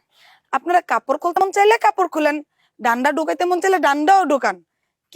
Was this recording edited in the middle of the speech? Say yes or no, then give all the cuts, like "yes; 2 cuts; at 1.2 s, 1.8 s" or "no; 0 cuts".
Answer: yes; 1 cut; at 1.4 s